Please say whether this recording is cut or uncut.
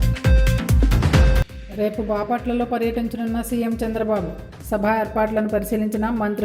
cut